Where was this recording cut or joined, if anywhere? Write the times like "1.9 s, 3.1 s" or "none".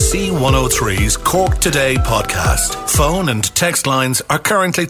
none